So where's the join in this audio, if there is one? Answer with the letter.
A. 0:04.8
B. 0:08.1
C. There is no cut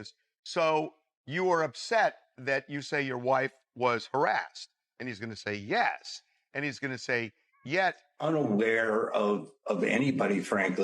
B